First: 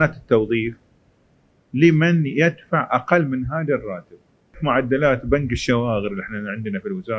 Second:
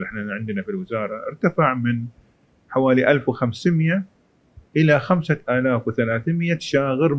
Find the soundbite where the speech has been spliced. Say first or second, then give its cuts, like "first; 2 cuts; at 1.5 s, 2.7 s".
first; 1 cut; at 4.6 s